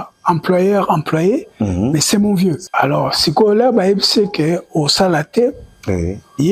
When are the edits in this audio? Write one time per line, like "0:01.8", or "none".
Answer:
0:02.6